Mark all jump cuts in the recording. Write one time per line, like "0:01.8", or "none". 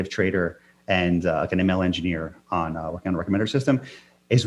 none

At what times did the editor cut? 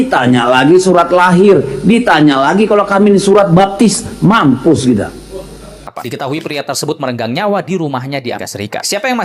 0:06.1

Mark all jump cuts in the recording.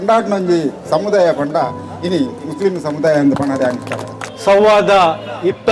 0:04.3

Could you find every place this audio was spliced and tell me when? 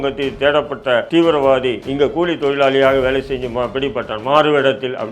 0:01.1
0:01.8

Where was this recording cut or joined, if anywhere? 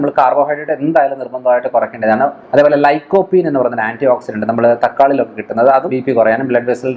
0:02.4
0:05.9

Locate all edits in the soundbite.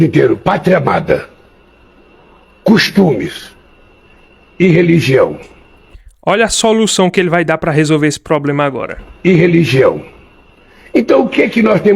none

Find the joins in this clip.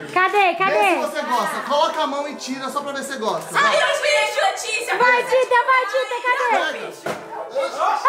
none

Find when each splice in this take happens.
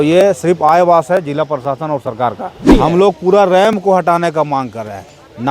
0:02.7

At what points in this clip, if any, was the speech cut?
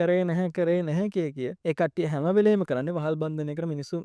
0:01.5

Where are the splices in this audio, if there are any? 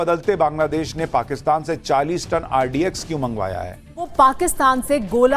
0:04.0

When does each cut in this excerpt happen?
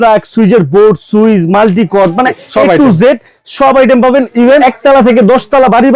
0:02.4
0:04.6

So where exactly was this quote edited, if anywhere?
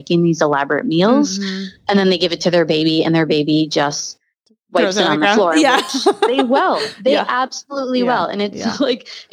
none

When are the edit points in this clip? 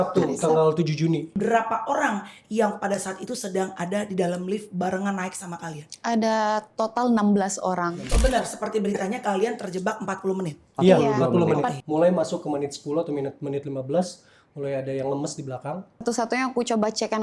0:01.3
0:08.0
0:11.7
0:16.0

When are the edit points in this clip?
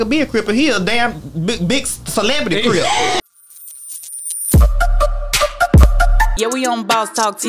0:03.2

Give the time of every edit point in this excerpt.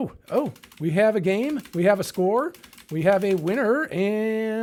none

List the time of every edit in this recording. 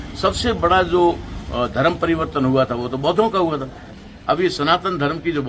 0:03.8

